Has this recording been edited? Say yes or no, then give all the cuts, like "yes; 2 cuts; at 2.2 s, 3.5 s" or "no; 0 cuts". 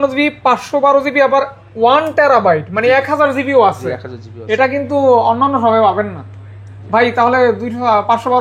no; 0 cuts